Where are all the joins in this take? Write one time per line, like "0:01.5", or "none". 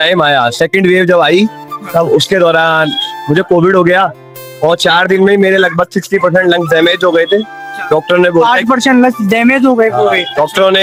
none